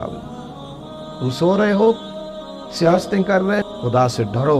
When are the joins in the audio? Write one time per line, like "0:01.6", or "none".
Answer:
0:03.7